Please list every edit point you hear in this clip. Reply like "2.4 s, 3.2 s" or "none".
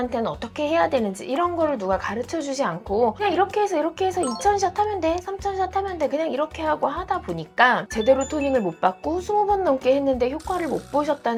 none